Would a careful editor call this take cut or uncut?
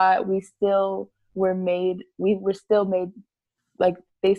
uncut